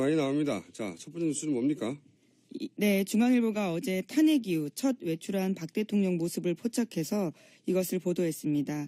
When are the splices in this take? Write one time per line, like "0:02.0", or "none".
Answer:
0:04.8